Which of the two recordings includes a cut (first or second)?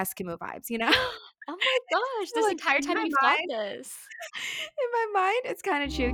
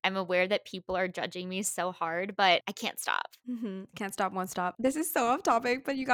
second